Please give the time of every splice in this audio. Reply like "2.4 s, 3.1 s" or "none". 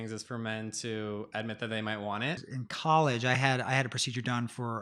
2.5 s

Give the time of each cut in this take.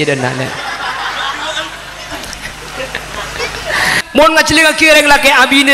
4.0 s

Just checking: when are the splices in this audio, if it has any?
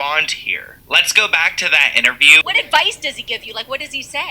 2.4 s

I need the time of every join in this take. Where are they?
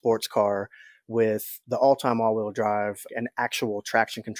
1.6 s, 3.0 s

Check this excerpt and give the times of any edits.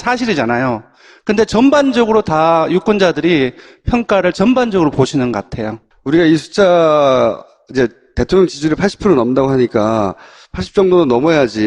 1.2 s

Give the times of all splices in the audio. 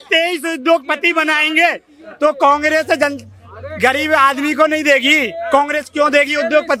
none

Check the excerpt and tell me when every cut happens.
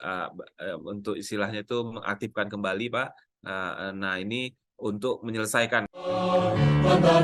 5.9 s

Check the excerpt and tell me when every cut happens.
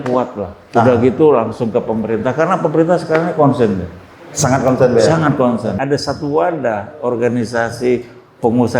5.8 s

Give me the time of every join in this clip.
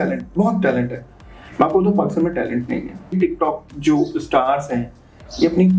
3.1 s

